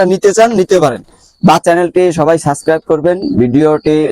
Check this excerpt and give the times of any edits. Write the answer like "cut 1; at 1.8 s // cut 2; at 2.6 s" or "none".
cut 1; at 1.6 s